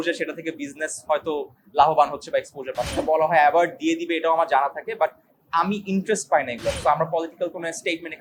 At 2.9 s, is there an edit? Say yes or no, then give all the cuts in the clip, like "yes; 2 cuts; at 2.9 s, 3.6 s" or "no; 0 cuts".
yes; 2 cuts; at 2.9 s, 6.8 s